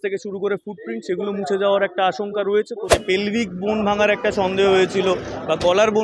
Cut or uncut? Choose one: cut